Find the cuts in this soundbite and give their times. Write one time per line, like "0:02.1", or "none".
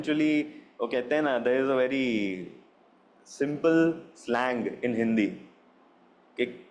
none